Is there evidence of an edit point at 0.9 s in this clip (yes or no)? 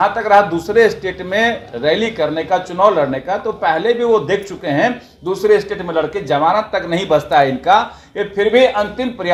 no